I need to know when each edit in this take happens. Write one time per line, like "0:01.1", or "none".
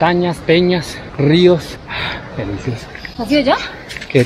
0:01.0
0:01.8